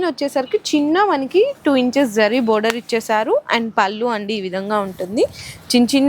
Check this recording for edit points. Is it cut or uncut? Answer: uncut